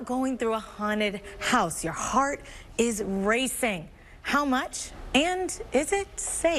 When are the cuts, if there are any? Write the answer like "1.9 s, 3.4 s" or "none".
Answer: none